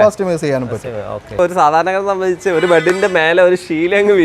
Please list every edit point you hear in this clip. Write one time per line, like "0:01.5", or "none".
0:01.3